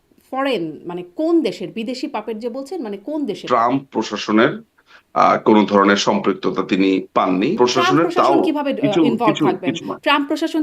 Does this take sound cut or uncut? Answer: cut